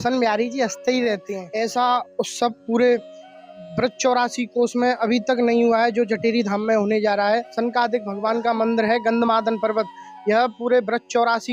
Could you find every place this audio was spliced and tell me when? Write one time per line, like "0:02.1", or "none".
0:01.4
0:07.5